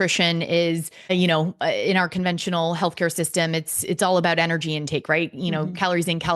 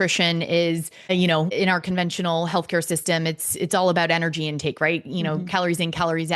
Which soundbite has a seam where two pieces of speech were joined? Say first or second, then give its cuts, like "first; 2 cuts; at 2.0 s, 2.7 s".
second; 1 cut; at 1.4 s